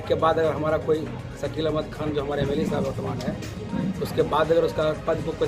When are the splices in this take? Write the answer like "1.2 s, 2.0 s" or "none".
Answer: none